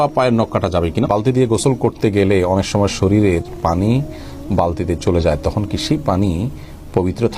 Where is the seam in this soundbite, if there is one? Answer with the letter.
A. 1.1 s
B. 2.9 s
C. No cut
A